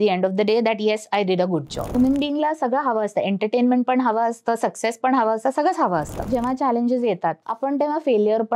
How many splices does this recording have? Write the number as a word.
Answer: two